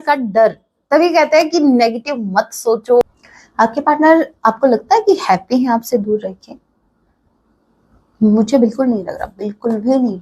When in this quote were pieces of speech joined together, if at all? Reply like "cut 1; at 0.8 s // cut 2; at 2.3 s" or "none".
cut 1; at 3.0 s